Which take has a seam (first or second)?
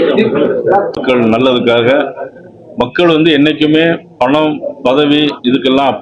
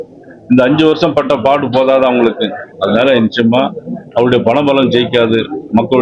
first